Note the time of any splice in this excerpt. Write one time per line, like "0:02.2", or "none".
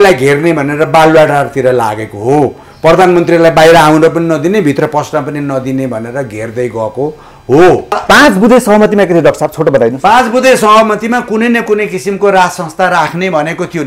0:08.0